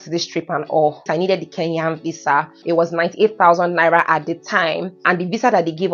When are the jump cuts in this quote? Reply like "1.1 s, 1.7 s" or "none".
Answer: 1.1 s, 2.5 s, 4.9 s